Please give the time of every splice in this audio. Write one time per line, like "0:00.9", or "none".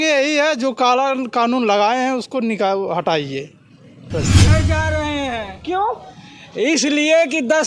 0:04.4